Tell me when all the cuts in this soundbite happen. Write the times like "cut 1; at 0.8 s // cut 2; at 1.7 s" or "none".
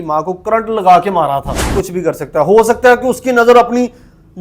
cut 1; at 1.8 s